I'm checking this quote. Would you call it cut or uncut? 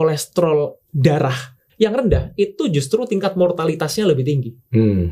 cut